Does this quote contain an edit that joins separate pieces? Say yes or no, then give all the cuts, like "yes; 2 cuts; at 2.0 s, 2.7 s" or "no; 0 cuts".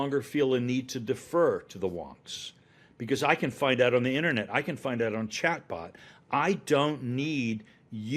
no; 0 cuts